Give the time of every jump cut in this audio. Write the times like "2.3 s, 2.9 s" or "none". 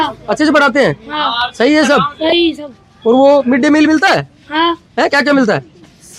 none